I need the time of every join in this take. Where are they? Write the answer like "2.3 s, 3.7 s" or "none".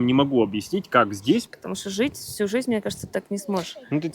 1.5 s